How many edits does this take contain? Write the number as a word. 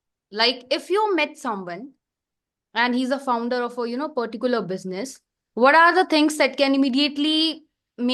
zero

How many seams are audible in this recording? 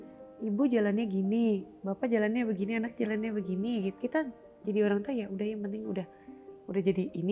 one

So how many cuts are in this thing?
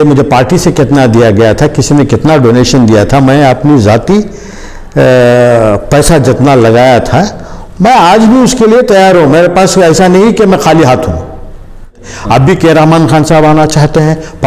one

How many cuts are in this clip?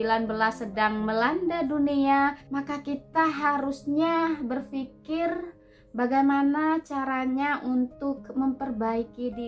one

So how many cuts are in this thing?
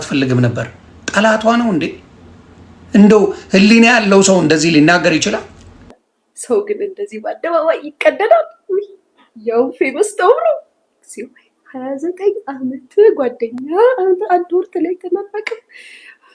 one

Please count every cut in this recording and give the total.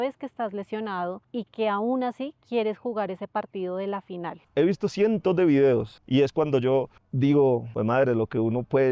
five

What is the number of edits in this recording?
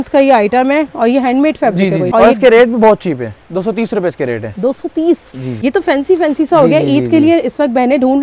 two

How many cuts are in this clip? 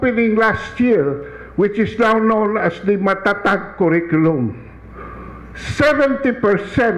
one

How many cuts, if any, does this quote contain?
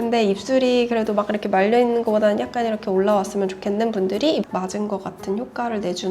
one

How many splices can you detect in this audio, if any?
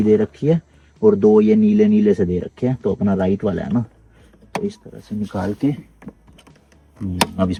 zero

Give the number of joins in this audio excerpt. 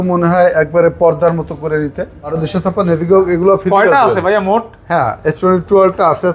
one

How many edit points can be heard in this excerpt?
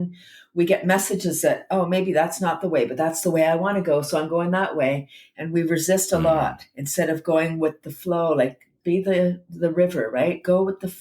one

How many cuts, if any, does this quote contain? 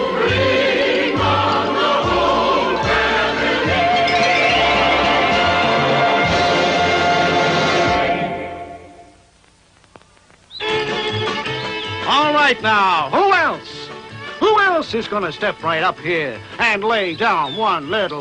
one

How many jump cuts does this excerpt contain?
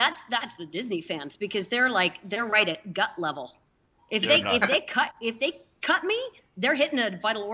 zero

